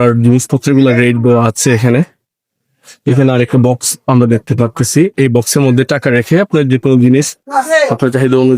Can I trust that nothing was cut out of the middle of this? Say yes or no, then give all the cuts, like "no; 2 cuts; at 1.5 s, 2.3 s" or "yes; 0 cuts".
no; 1 cut; at 7.4 s